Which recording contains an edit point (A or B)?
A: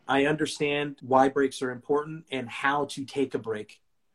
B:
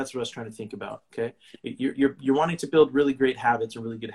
A